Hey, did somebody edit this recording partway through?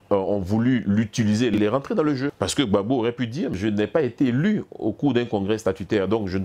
yes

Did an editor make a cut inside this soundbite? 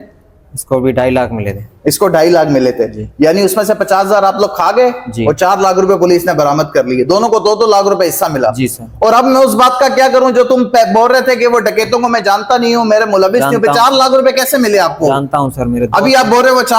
no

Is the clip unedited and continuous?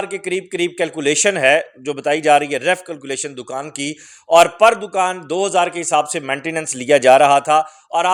yes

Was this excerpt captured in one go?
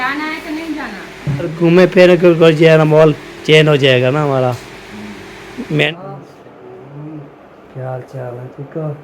no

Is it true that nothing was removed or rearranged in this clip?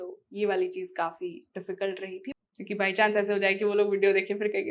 no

